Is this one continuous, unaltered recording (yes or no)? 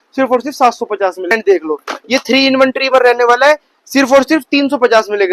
no